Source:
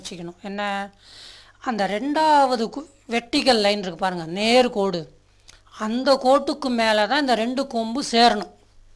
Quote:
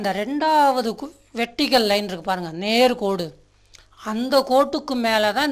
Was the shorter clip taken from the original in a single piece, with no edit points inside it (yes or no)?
yes